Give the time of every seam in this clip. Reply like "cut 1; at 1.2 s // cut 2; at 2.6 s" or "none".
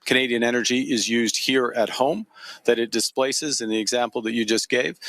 cut 1; at 3.4 s